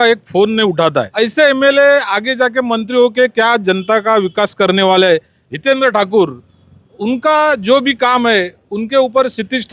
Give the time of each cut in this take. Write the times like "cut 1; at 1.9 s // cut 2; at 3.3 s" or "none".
cut 1; at 1.1 s // cut 2; at 5.4 s